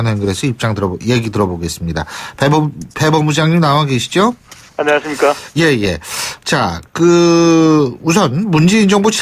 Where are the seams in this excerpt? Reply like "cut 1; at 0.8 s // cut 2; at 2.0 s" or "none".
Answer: cut 1; at 3.4 s